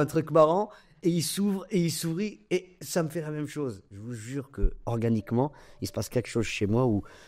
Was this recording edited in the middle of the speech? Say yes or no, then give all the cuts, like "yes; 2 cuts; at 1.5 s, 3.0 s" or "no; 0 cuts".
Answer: no; 0 cuts